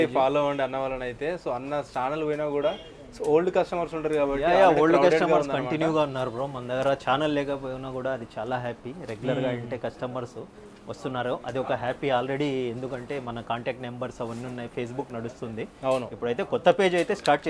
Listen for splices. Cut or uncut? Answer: uncut